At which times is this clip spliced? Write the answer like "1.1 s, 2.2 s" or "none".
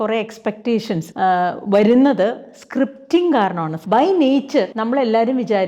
1.1 s, 3.7 s, 4.7 s